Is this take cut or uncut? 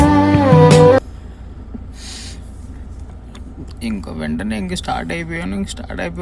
uncut